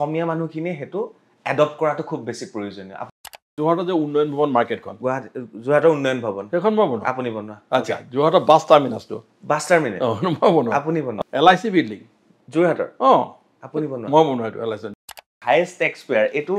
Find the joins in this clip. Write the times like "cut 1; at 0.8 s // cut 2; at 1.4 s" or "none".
cut 1; at 3.5 s // cut 2; at 11.1 s // cut 3; at 14.9 s